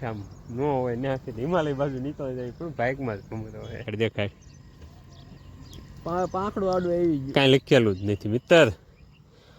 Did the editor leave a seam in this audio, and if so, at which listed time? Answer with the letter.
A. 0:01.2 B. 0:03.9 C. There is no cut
B